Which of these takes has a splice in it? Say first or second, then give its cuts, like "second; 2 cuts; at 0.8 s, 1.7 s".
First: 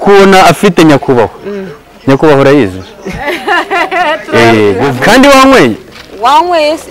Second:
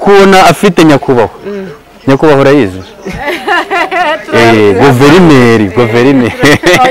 first; 1 cut; at 4.9 s